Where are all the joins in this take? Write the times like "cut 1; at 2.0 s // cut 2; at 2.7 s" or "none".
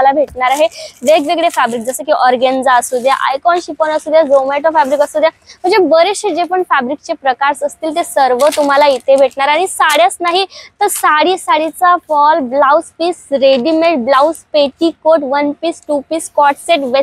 none